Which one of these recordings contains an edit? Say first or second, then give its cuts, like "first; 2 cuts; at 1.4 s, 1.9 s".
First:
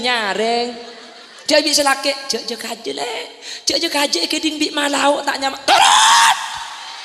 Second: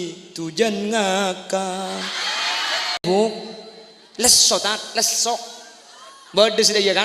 second; 1 cut; at 3.0 s